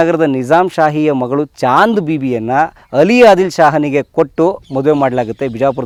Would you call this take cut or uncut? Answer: uncut